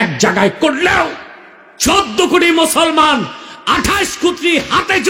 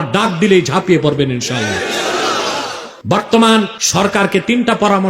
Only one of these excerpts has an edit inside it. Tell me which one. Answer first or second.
second